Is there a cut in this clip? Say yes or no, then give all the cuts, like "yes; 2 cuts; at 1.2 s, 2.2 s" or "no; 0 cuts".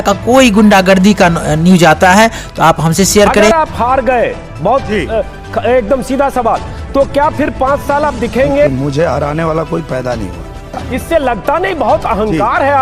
yes; 3 cuts; at 3.5 s, 8.7 s, 10.8 s